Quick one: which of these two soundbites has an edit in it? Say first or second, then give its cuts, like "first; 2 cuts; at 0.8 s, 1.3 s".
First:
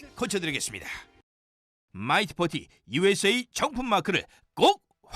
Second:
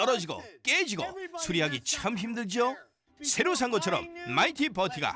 first; 1 cut; at 1.1 s